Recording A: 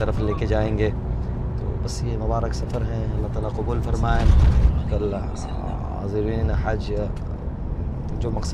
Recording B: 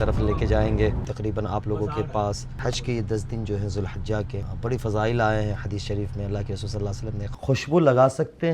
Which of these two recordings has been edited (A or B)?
B